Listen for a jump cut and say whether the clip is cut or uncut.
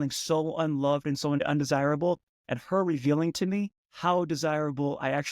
cut